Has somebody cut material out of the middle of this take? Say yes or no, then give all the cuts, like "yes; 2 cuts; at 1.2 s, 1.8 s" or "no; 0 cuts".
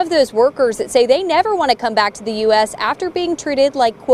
no; 0 cuts